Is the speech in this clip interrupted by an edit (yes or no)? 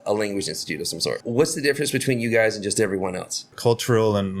yes